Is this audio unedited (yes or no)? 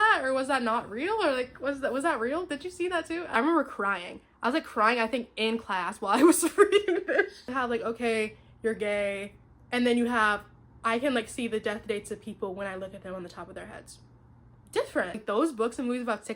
no